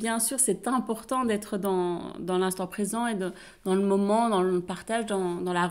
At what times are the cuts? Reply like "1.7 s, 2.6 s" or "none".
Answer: none